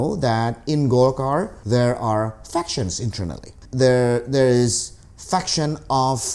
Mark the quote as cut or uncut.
cut